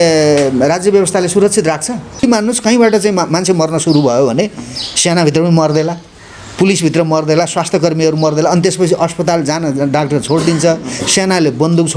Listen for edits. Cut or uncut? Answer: cut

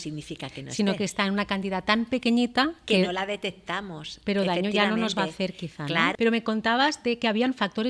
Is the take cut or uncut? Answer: cut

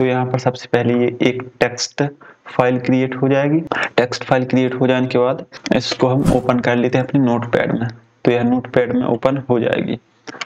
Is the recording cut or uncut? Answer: cut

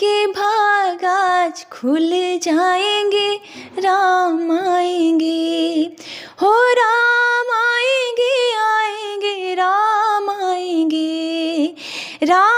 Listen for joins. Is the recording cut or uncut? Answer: uncut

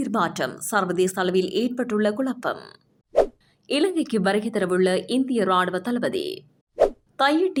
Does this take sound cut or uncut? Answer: uncut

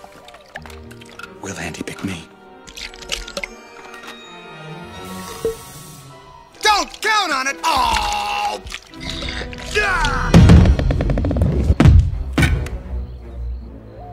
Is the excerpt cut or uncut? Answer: cut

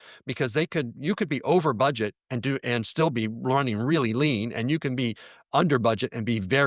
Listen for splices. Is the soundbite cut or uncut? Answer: uncut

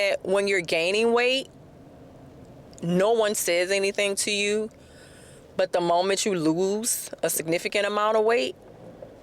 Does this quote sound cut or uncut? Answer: uncut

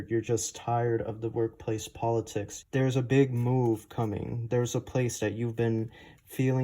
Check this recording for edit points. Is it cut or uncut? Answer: cut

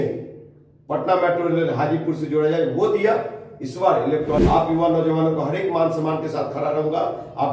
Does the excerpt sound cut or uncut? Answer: cut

